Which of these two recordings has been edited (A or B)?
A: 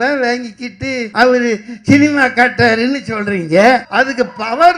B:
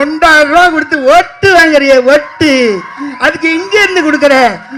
A